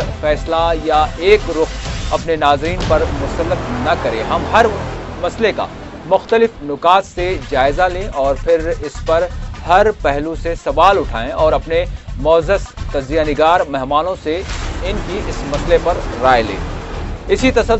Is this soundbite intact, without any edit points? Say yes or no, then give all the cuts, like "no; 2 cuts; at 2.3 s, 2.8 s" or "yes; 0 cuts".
no; 1 cut; at 14.0 s